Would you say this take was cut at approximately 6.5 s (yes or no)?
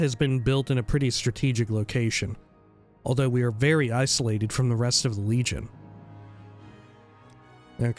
no